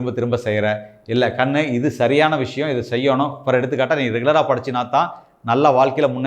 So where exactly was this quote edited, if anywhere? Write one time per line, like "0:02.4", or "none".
none